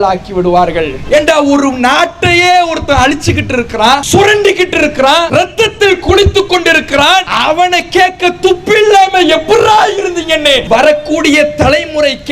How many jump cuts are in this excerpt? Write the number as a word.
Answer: five